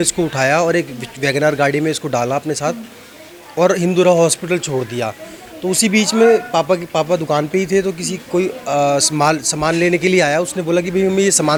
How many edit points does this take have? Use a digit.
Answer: 0